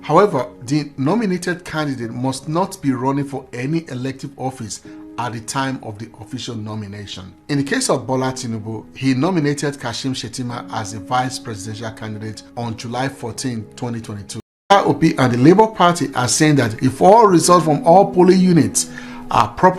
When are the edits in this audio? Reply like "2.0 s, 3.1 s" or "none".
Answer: 14.5 s